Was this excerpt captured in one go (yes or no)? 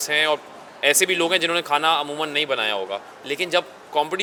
yes